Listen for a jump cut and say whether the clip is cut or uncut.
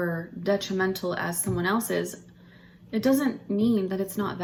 uncut